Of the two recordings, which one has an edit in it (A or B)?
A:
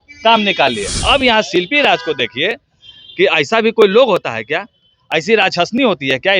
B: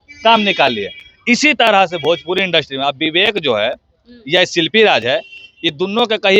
A